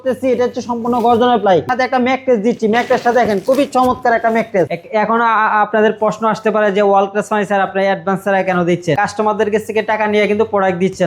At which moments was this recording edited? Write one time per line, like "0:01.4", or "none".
0:01.7
0:04.7
0:09.0